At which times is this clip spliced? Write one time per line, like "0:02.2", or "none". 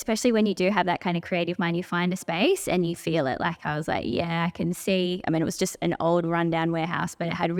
none